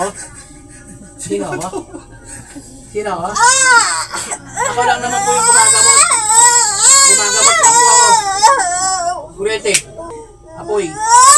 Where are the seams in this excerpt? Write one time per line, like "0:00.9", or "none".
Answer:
0:10.1